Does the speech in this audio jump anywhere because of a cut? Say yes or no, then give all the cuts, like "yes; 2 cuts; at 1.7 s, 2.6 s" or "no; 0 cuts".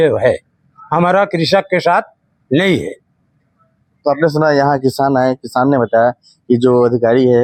no; 0 cuts